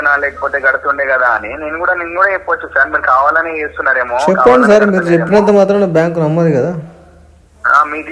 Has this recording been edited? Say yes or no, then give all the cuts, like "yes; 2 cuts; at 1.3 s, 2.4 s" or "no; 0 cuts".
no; 0 cuts